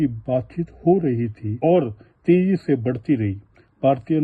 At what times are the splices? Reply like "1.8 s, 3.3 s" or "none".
1.6 s